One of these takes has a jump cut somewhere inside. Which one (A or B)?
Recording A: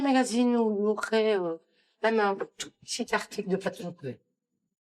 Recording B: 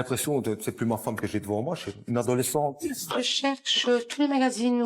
B